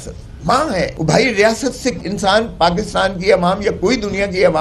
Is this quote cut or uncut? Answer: cut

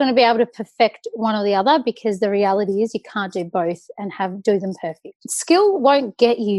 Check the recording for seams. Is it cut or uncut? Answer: cut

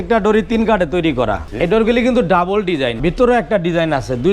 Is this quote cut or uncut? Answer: cut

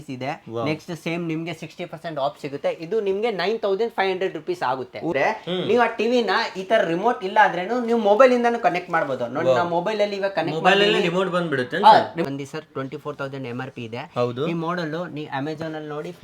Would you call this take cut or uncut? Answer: cut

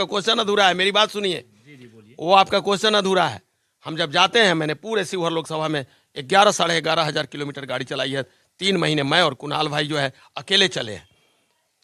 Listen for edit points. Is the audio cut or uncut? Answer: uncut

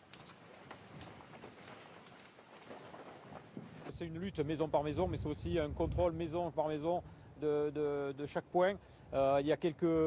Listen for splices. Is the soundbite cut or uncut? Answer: uncut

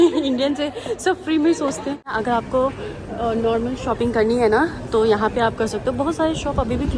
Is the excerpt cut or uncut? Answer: cut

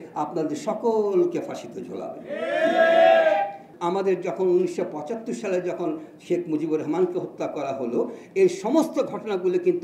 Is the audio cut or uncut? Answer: cut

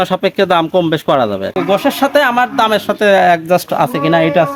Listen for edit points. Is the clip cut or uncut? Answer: cut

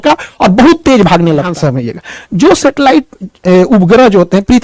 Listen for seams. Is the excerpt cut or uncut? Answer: cut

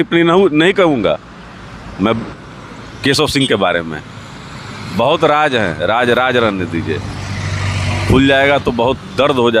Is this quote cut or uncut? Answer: uncut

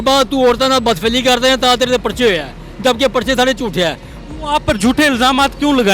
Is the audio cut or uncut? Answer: cut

